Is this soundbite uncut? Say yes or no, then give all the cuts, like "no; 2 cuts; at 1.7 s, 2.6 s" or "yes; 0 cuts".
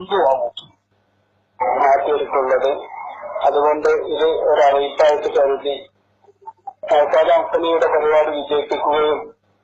no; 1 cut; at 5.1 s